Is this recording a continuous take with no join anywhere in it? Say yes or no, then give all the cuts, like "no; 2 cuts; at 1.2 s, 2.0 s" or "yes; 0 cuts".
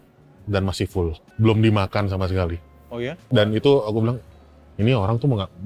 no; 2 cuts; at 1.2 s, 3.2 s